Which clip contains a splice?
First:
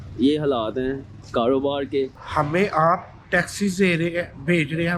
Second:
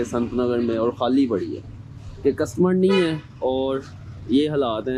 first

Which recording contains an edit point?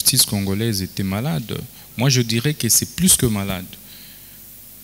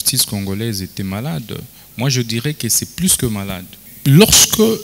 second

